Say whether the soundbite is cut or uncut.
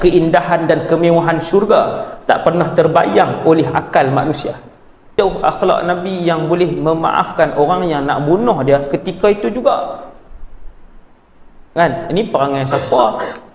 cut